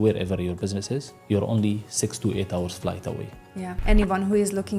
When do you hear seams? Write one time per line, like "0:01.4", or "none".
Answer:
0:01.1
0:03.8